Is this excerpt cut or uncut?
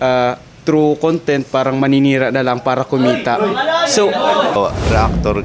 cut